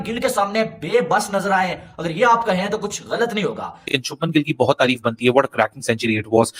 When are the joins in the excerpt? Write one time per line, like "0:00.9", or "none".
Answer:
0:03.9